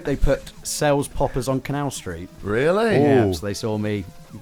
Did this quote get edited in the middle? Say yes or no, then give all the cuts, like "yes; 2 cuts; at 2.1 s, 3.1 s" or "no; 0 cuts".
no; 0 cuts